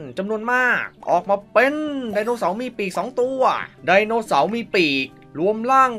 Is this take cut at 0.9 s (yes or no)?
no